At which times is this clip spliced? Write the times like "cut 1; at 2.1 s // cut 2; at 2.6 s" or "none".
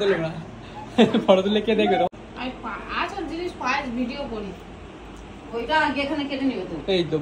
cut 1; at 2.1 s

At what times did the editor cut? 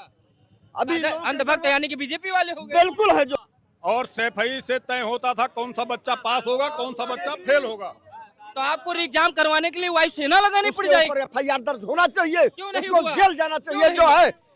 cut 1; at 3.3 s // cut 2; at 10.8 s

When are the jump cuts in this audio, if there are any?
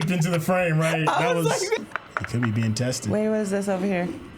cut 1; at 1.8 s

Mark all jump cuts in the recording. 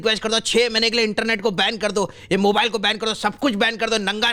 none

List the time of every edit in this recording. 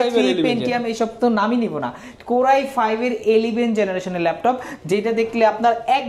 none

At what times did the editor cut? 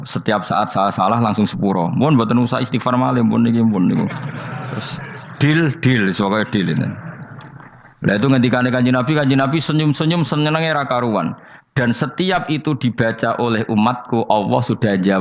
none

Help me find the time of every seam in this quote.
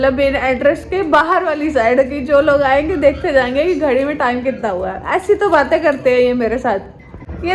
none

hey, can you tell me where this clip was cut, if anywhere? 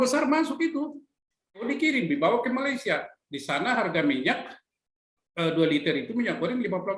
cut 1; at 1.6 s

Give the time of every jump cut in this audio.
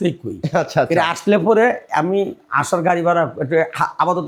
none

